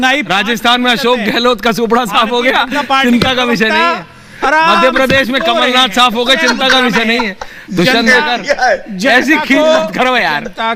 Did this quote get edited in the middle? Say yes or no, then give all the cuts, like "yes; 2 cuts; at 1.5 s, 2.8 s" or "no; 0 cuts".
no; 0 cuts